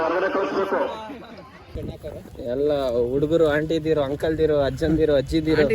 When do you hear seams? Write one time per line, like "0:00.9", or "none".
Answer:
0:01.8